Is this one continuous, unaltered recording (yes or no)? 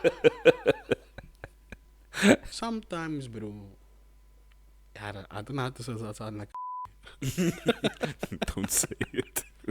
no